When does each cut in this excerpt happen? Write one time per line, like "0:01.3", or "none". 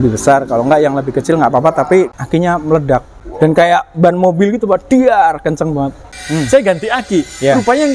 0:02.2
0:03.2
0:06.2